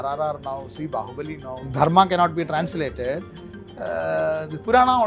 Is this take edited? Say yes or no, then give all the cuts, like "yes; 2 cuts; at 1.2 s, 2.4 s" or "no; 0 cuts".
yes; 1 cut; at 1.7 s